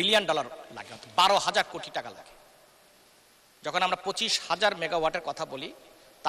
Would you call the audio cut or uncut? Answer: uncut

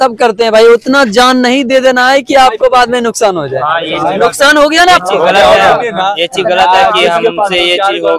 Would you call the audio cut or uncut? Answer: uncut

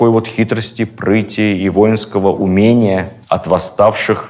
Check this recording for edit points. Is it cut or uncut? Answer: uncut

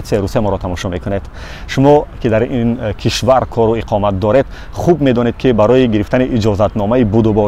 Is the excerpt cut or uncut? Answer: uncut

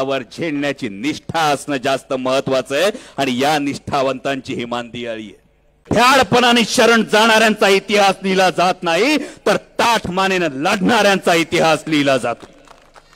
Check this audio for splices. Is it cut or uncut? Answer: cut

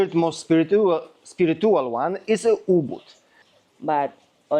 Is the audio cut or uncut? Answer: cut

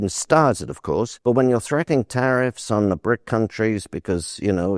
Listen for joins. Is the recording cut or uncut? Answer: cut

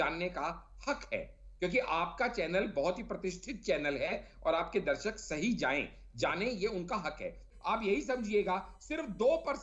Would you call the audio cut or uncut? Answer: cut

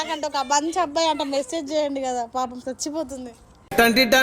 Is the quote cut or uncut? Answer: uncut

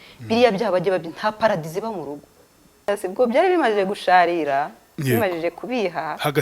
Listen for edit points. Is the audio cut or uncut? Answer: cut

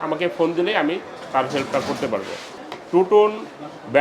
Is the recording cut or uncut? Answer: cut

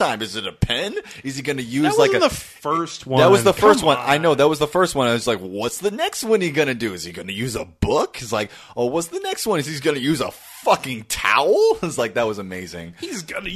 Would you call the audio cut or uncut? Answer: uncut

